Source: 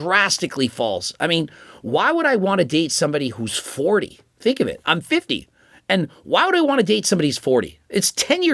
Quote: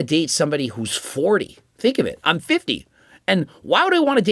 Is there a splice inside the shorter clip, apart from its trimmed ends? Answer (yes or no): no